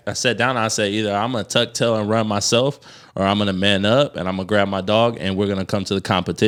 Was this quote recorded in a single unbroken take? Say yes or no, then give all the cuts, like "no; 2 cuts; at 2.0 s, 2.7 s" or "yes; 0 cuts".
yes; 0 cuts